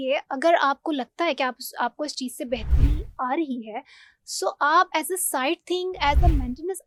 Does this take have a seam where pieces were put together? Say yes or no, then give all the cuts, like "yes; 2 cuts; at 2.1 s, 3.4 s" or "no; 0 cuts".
no; 0 cuts